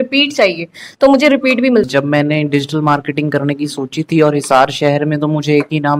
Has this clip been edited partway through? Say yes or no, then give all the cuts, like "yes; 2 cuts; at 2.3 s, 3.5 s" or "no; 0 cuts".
yes; 1 cut; at 1.9 s